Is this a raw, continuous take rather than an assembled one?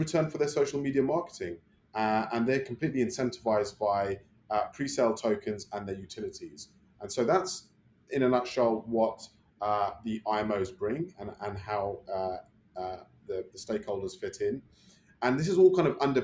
yes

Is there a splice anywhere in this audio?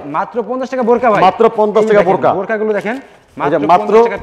no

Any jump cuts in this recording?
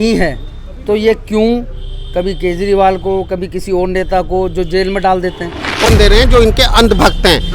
yes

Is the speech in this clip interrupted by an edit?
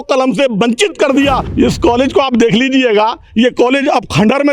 yes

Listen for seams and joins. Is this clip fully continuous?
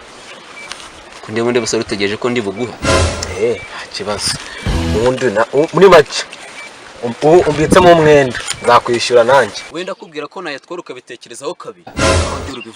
no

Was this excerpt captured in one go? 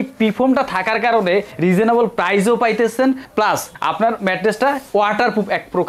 no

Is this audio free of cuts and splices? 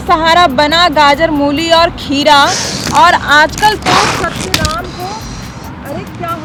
yes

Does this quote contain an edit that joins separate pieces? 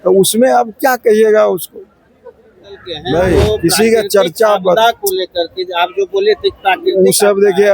yes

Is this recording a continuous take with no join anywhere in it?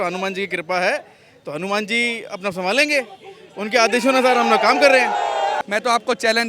no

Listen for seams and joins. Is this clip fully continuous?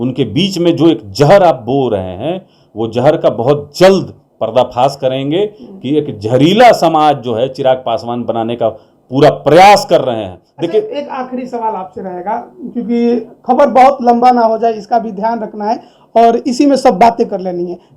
yes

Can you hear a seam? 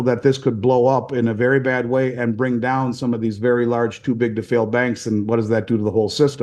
no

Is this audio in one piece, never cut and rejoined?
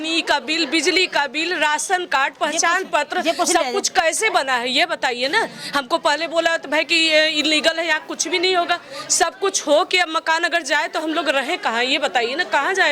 yes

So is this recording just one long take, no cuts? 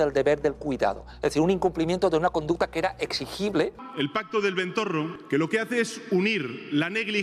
no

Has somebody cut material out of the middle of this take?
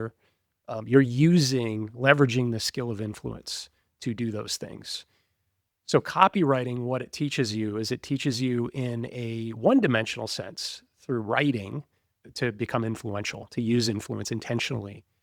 yes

